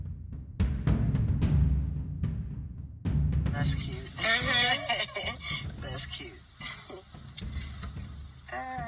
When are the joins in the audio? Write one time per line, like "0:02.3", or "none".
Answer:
0:03.5